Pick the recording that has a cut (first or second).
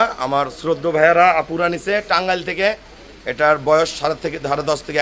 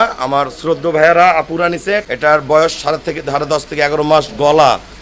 second